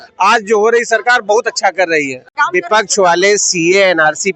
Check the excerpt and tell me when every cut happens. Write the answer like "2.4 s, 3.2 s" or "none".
2.4 s